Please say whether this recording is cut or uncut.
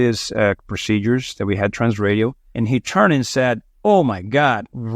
cut